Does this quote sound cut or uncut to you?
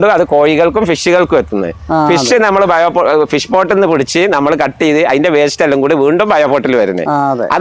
uncut